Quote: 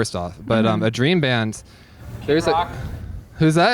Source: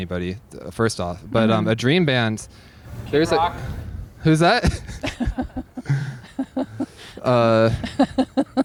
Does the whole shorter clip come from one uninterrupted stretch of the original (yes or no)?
yes